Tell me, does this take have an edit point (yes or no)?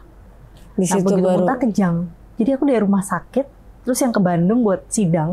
yes